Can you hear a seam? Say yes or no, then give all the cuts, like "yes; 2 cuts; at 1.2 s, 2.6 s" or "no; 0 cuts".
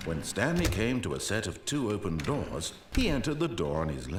no; 0 cuts